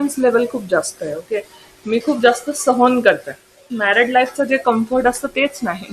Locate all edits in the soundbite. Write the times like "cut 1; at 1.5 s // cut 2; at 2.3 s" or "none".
cut 1; at 3.7 s